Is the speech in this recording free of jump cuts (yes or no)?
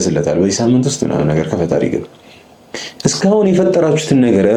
yes